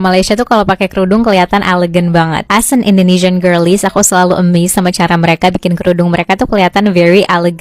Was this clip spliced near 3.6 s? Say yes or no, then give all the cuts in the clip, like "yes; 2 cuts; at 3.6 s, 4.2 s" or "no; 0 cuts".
no; 0 cuts